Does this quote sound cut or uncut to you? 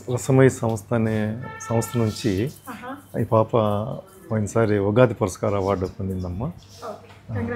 uncut